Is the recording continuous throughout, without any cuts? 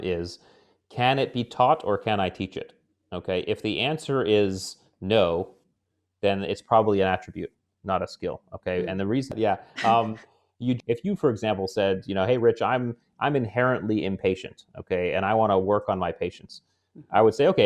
no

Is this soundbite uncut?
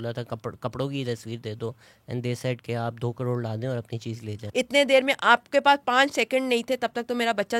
no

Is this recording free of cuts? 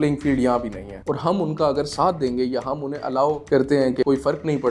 no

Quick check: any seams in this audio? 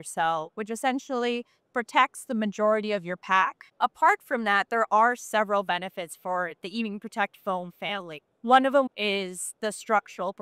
yes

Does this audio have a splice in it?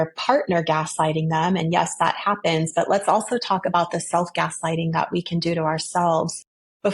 no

